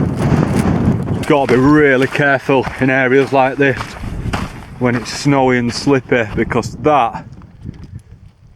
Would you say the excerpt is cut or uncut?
cut